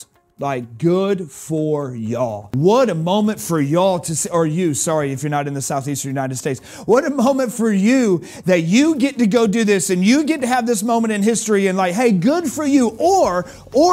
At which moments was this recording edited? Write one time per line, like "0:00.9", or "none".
0:02.4